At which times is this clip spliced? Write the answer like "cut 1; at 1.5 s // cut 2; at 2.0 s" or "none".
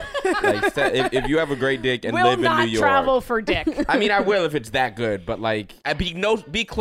cut 1; at 5.8 s